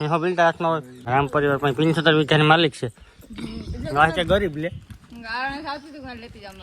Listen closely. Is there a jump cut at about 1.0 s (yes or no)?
yes